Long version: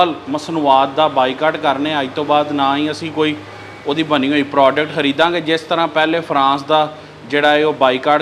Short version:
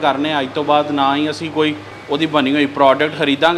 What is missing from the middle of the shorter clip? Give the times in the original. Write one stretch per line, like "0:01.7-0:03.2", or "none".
0:03.5-0:03.7